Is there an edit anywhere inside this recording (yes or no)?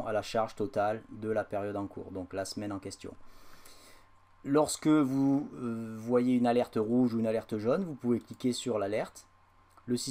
no